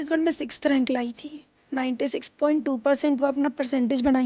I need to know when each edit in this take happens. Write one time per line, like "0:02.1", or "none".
none